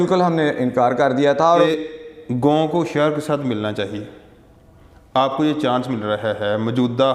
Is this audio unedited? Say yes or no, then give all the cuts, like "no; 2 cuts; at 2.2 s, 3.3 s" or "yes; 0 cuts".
no; 1 cut; at 1.5 s